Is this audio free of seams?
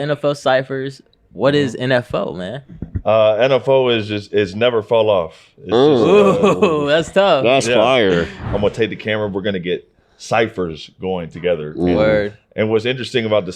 no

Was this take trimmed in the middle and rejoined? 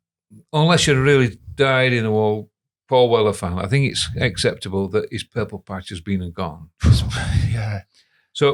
no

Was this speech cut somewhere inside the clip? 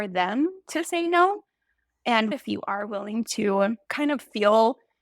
yes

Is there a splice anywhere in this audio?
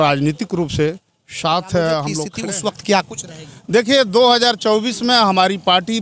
yes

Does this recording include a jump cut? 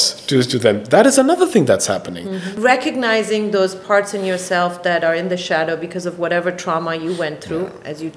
yes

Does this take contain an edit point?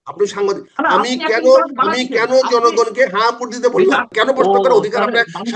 yes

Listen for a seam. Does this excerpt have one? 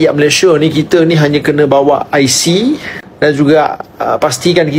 no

